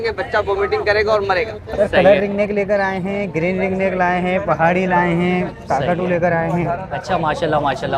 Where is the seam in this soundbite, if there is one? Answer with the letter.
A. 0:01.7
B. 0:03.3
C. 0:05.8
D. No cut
A